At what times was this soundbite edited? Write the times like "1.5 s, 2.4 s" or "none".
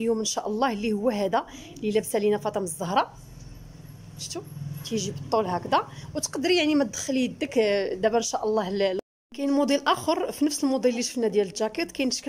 9.0 s